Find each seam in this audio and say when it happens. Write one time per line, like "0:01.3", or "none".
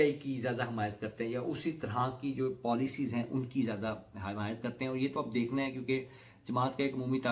none